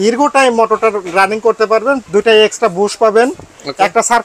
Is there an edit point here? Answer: yes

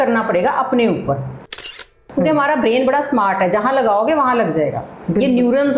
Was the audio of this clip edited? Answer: yes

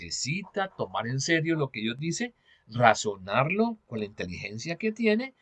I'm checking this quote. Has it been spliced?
no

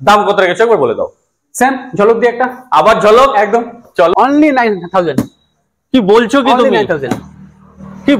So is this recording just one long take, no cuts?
no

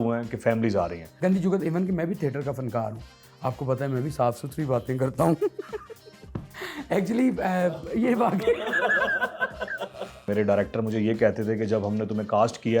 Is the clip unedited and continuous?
no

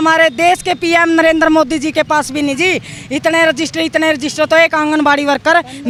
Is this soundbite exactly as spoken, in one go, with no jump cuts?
yes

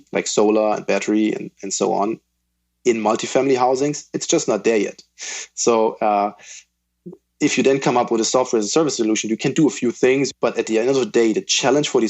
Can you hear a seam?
yes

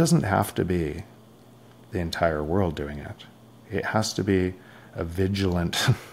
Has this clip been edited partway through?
no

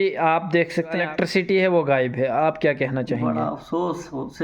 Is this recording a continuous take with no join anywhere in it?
no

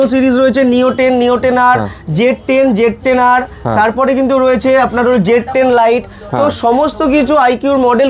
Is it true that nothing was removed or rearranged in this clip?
yes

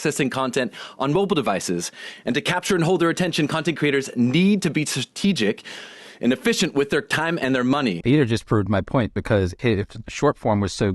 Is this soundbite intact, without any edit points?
no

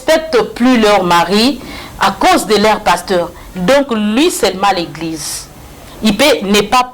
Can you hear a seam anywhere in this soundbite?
no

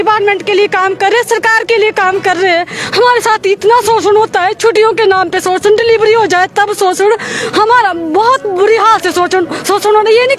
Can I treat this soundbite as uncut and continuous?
yes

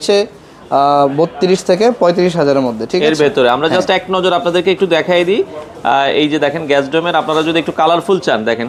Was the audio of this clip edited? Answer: no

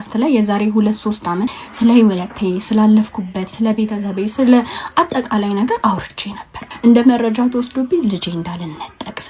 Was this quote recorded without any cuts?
no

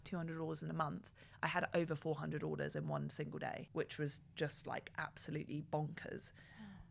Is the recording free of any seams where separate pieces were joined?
yes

